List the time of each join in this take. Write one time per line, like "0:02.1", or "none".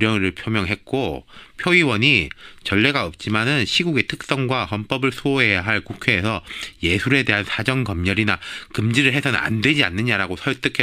0:07.0

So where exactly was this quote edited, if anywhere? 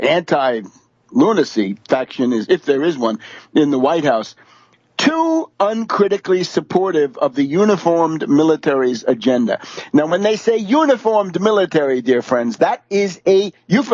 0:02.0

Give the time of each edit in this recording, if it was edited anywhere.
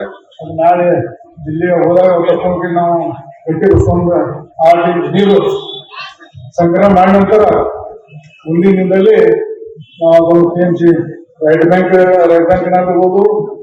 none

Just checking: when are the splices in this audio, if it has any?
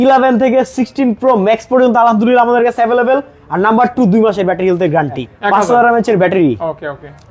0:05.3

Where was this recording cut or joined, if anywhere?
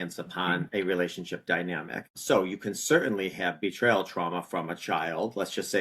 0:02.2

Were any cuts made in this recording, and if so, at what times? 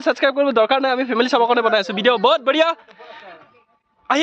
none

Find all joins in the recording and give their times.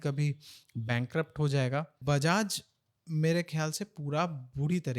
0:02.0

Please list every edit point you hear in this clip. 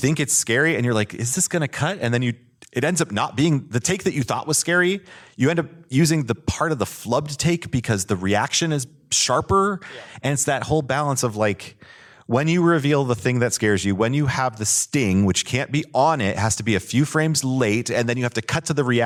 none

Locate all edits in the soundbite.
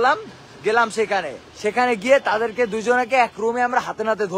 0:01.4

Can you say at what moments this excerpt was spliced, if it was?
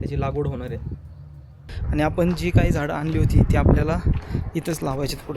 0:01.8

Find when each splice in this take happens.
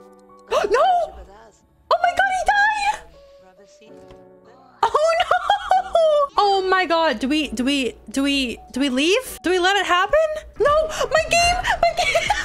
0:10.4

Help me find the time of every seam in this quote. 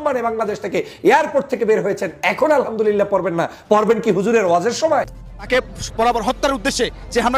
0:05.1

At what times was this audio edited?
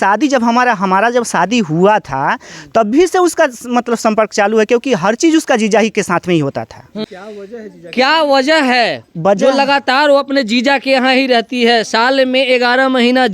0:07.0

